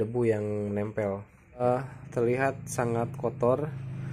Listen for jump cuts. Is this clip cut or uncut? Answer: cut